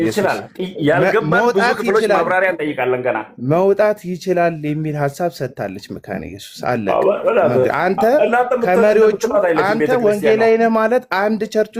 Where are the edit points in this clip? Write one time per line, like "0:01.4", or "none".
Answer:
none